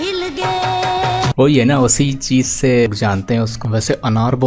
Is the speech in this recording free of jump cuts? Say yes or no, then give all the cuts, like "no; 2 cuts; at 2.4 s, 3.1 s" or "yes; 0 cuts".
no; 1 cut; at 2.9 s